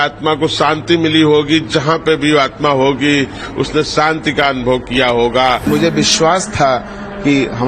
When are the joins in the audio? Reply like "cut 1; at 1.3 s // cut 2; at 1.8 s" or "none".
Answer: cut 1; at 5.7 s